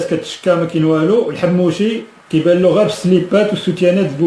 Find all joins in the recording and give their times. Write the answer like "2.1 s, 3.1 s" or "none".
1.1 s